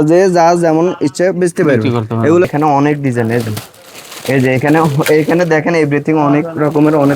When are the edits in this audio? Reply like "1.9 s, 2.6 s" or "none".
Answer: 2.5 s